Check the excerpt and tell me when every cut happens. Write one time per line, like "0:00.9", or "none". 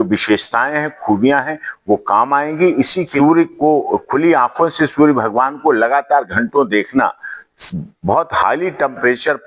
0:03.1

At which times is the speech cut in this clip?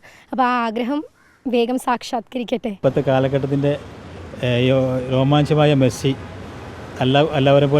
0:02.8

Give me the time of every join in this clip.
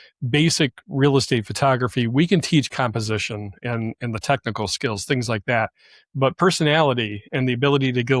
none

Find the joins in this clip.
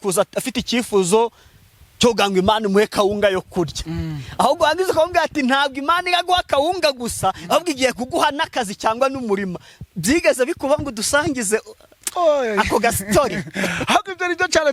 none

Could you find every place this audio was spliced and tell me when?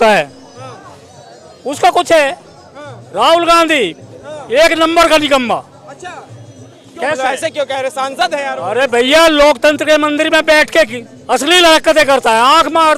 none

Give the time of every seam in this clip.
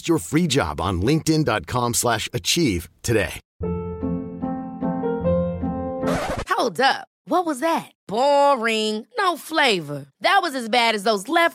0:03.4

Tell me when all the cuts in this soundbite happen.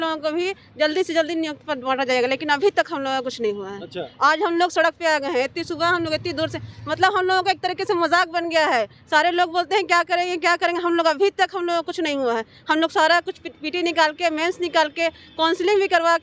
none

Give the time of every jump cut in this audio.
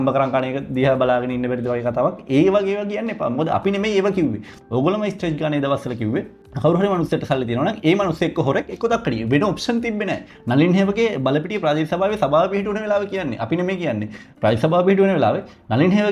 0:04.5
0:06.4

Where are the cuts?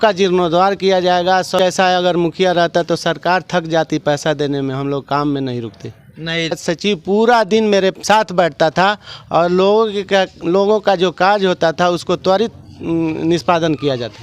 0:01.6
0:06.6

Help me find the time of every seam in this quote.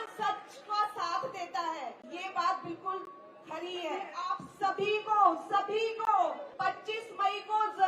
0:02.1
0:04.2
0:06.5

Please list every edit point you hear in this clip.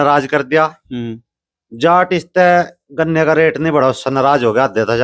none

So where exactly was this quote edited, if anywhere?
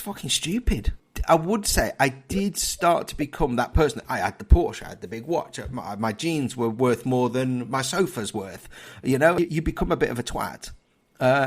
0:01.0
0:09.4

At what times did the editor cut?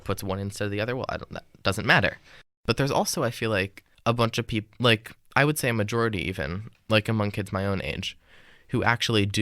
0:02.5
0:03.8

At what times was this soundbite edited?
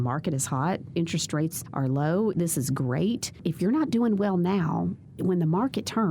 0:01.6
0:02.3
0:03.3
0:05.0

